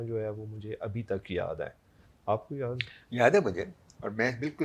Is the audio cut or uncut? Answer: uncut